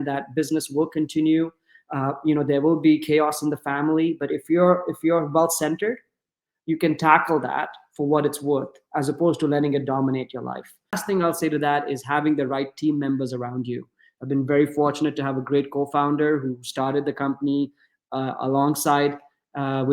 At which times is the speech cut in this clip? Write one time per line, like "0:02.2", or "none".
0:11.0